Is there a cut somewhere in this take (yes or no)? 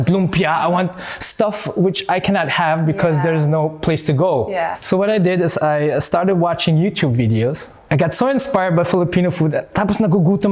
yes